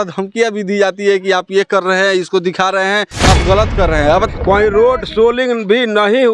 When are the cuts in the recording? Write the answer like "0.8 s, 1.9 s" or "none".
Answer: 4.3 s